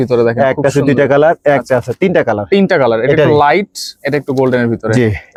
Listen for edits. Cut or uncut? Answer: uncut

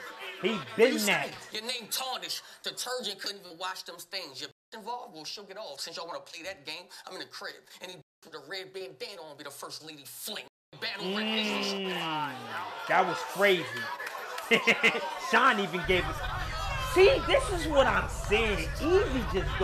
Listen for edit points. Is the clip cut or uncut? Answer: cut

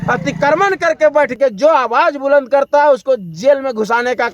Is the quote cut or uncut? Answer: cut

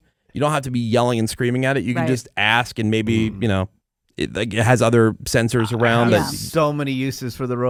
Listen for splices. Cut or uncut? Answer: uncut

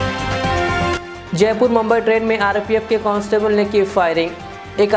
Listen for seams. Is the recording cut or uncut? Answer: cut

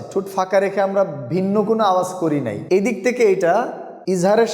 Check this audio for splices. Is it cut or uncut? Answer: uncut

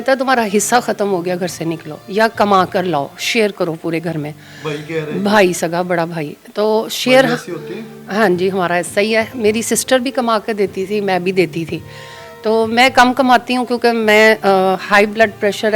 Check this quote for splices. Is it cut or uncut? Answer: uncut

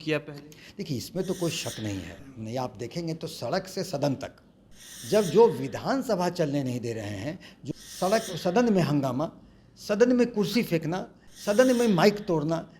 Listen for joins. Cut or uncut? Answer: cut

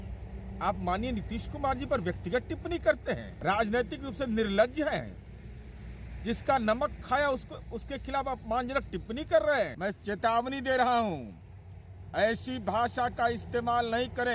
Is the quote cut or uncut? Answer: cut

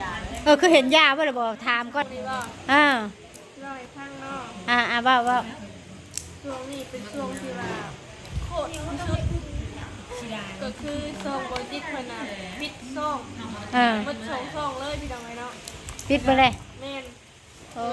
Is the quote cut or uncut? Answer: cut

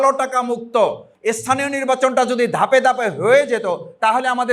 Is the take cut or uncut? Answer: cut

